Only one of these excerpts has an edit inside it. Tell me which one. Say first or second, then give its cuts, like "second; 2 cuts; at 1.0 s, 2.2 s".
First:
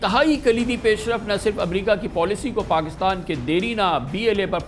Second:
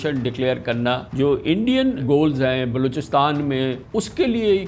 second; 3 cuts; at 1.1 s, 2.0 s, 3.8 s